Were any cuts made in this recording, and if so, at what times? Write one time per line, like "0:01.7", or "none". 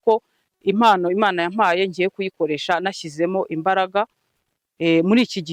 none